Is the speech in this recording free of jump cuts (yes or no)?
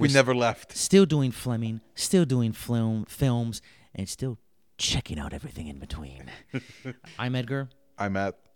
no